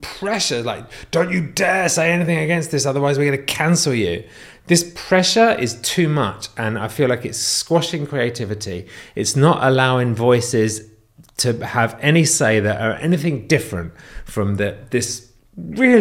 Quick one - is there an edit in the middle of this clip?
no; 0 cuts

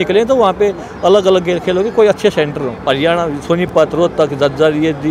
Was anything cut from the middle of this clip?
yes; 1 cut; at 2.8 s

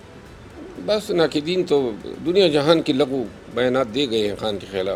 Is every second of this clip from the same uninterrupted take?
yes; 0 cuts

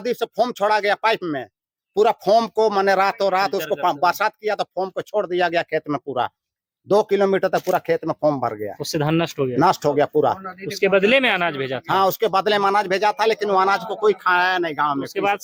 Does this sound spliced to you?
no; 0 cuts

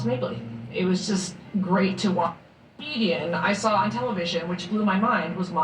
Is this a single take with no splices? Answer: no; 2 cuts; at 2.3 s, 3.8 s

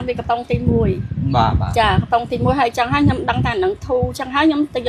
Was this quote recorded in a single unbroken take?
yes; 0 cuts

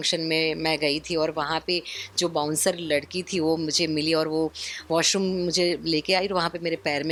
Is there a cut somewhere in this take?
no; 0 cuts

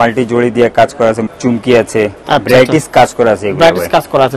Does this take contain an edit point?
yes; 2 cuts; at 1.3 s, 2.2 s

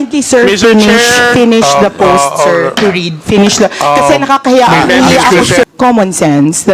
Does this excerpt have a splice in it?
yes; 1 cut; at 5.6 s

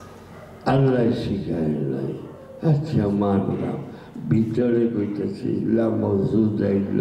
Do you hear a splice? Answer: no; 0 cuts

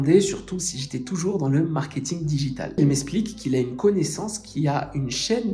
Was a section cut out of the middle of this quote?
yes; 1 cut; at 2.8 s

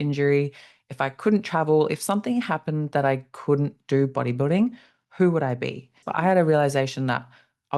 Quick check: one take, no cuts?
no; 1 cut; at 6.0 s

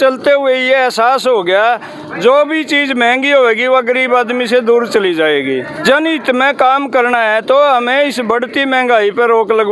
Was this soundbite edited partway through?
yes; 1 cut; at 5.7 s

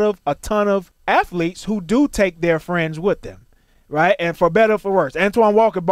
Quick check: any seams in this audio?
yes; 1 cut; at 0.9 s

